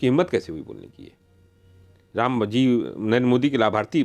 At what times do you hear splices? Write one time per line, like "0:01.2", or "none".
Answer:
none